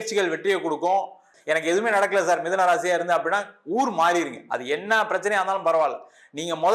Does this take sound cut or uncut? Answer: cut